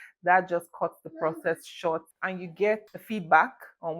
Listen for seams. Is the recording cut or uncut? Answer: cut